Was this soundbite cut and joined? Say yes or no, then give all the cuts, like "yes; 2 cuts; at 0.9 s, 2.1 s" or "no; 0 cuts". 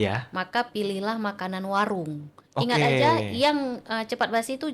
no; 0 cuts